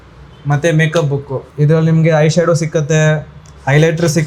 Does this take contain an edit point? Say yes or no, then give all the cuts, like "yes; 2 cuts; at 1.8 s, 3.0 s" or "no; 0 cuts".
yes; 1 cut; at 1.5 s